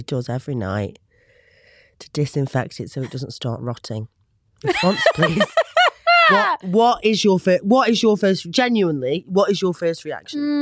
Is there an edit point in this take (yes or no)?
no